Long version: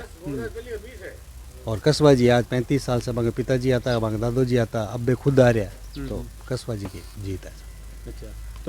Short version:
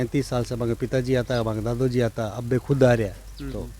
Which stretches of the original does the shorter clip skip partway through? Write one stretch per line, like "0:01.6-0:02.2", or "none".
none